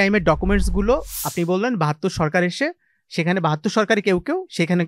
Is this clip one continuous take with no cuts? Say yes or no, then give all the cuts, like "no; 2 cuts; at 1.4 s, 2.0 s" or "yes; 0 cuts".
yes; 0 cuts